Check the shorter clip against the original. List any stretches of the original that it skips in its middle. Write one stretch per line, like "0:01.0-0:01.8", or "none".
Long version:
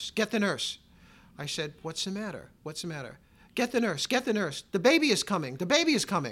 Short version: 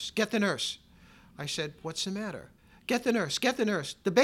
0:02.5-0:03.2